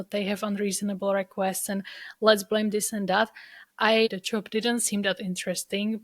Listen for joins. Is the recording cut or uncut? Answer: cut